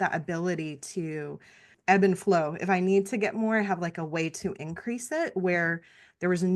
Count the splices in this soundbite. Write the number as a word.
one